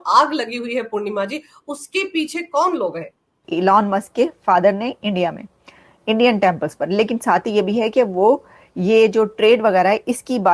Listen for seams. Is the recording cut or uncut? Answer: cut